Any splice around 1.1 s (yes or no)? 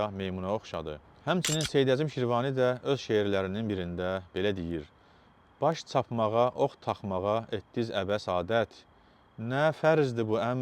yes